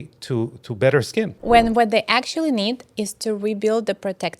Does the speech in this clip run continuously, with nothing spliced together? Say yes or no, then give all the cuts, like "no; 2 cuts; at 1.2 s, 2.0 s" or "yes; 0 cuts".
no; 1 cut; at 1.4 s